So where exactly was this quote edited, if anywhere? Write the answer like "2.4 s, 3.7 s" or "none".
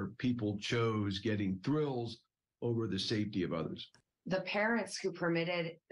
4.1 s

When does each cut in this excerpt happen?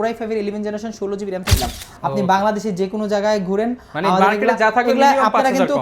1.6 s

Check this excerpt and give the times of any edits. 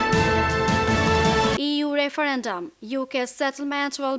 none

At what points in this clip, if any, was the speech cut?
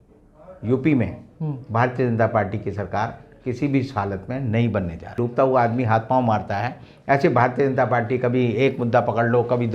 5.2 s

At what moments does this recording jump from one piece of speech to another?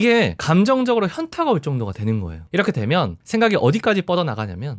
none

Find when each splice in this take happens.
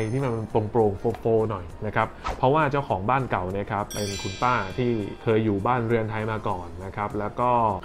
none

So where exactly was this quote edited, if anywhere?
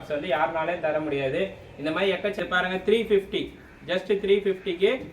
2.4 s

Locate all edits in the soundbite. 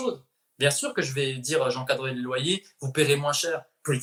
none

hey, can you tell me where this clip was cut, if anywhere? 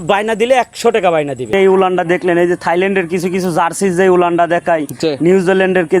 1.5 s

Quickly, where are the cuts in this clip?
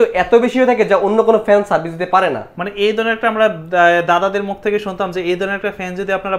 none

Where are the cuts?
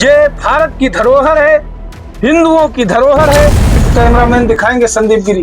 3.8 s

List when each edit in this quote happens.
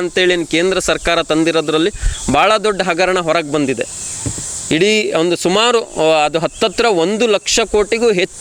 none

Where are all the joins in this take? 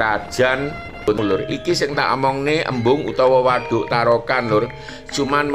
1.2 s

